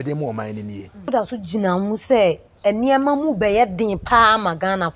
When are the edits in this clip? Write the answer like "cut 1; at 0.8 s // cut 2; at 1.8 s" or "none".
cut 1; at 1.1 s